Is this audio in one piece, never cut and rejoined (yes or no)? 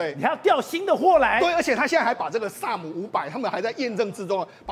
yes